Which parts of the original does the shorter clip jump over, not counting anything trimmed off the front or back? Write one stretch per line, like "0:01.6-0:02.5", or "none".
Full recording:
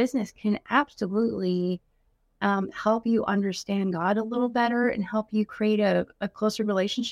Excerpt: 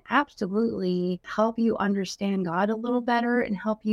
0:01.9-0:02.7